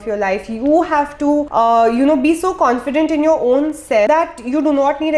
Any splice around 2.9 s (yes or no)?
no